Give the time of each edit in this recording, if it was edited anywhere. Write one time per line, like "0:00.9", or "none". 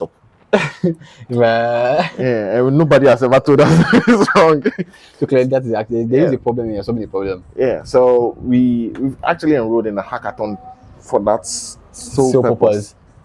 none

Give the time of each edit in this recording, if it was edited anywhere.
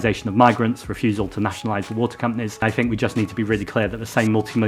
0:02.6

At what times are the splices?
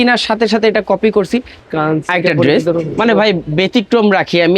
0:01.5

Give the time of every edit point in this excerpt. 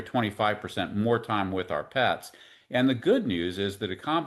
none

